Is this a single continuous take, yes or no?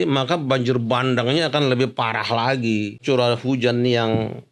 no